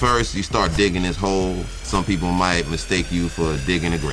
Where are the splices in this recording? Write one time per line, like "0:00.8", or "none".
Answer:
0:01.8